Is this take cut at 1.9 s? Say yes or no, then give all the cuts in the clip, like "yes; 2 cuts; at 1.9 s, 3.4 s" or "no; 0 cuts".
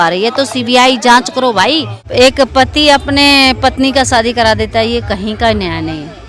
yes; 1 cut; at 1.9 s